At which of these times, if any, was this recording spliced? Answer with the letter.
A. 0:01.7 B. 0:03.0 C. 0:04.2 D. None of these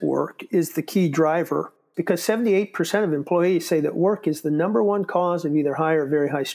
A